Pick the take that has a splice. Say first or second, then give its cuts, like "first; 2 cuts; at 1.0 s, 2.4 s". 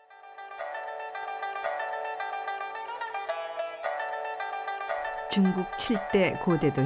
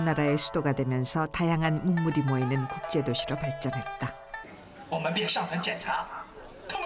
second; 1 cut; at 4.5 s